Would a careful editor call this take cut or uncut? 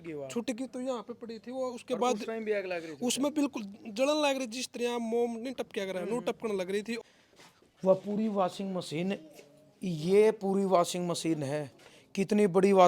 cut